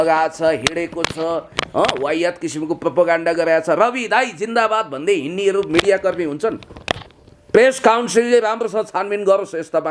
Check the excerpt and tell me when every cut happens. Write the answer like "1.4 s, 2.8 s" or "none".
none

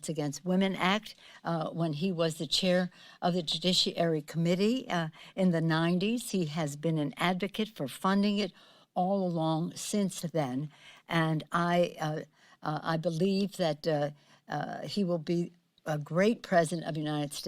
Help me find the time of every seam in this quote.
2.0 s

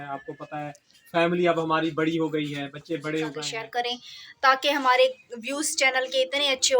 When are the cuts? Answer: 3.5 s

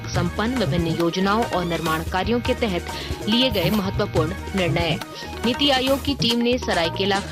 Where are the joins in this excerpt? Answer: none

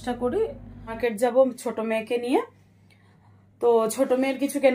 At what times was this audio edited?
1.0 s

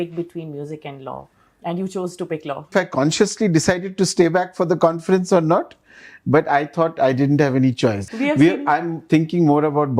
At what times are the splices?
2.7 s, 8.1 s

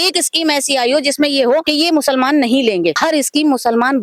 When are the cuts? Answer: 1.7 s, 3.0 s

